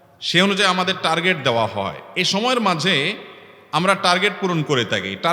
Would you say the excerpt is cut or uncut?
uncut